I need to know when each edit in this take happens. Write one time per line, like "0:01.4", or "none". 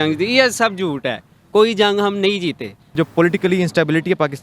0:02.9